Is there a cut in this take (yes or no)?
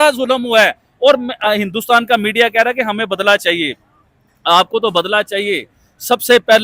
no